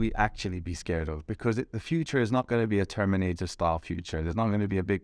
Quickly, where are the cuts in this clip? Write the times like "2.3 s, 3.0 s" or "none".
none